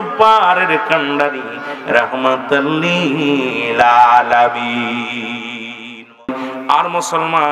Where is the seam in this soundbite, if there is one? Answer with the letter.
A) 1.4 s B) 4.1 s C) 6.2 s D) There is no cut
C